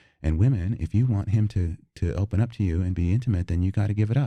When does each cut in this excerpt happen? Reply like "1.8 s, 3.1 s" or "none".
none